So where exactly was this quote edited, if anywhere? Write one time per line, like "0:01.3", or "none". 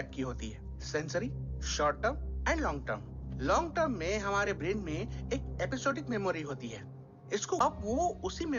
0:07.6